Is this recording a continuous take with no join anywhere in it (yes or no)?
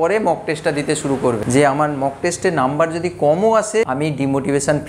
no